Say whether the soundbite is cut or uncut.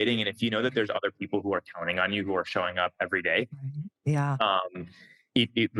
uncut